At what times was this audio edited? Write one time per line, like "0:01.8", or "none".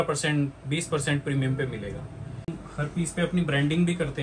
0:02.6